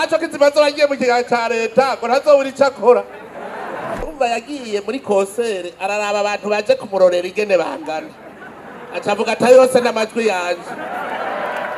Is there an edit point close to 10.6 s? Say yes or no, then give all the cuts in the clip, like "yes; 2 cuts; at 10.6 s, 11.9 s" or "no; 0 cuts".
no; 1 cut; at 4.1 s